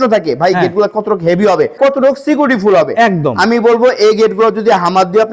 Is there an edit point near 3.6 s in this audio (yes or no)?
no